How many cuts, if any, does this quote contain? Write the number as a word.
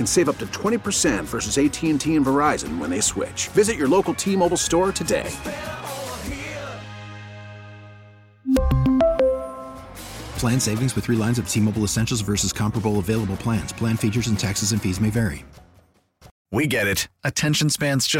one